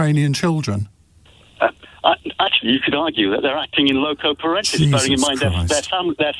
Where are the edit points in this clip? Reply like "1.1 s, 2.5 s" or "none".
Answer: 1.8 s